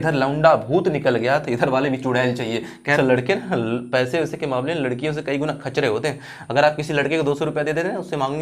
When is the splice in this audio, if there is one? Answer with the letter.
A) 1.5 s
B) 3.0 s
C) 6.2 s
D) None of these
B